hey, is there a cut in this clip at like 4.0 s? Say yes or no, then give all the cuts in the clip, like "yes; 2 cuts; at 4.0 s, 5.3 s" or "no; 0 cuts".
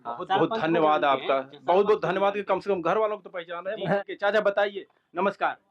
yes; 1 cut; at 4.0 s